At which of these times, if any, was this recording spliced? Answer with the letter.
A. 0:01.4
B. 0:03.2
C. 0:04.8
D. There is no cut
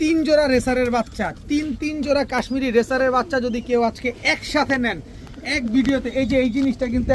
D